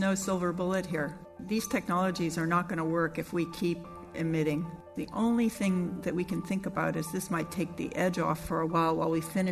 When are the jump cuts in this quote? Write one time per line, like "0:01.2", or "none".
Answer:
0:01.3
0:04.9